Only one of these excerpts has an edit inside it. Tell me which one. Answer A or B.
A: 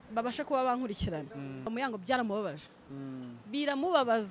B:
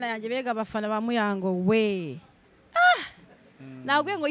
A